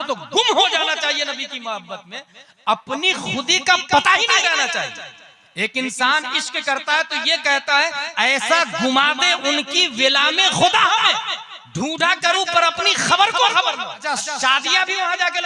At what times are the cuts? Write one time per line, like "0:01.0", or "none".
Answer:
0:14.1

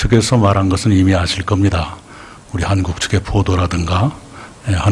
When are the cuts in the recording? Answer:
0:02.8

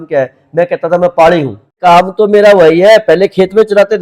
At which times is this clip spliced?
0:01.8

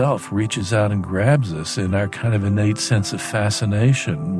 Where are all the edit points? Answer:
0:01.9

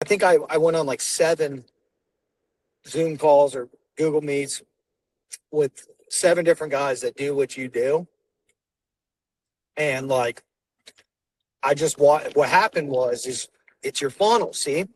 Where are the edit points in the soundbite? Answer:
none

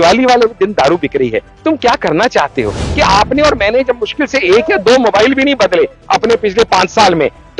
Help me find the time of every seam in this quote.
0:02.9

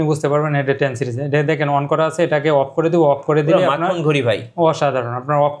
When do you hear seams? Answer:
none

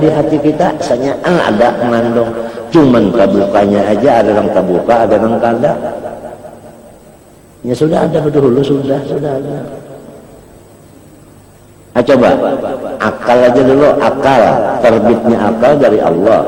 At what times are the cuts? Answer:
none

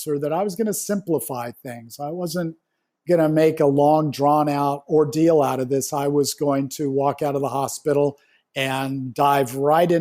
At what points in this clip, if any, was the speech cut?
0:04.8

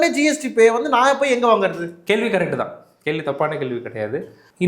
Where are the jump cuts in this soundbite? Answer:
0:01.9

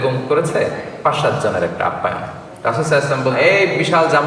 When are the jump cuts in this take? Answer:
0:03.4

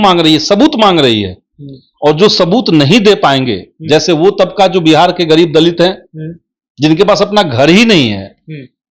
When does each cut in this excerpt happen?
none

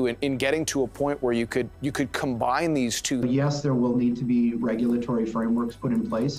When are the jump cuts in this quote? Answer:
none

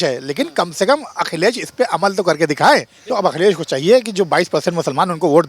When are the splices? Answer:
0:03.0

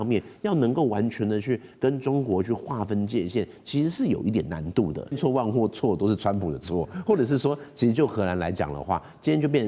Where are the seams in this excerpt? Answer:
0:05.2

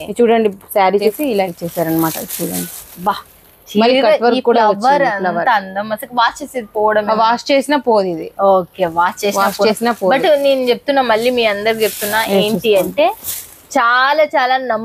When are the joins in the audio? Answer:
0:01.2

